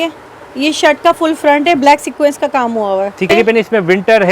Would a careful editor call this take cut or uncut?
cut